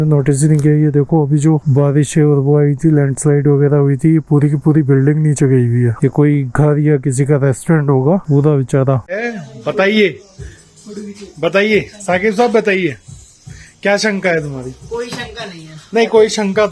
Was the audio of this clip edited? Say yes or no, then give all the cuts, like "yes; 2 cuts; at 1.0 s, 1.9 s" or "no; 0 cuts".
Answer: no; 0 cuts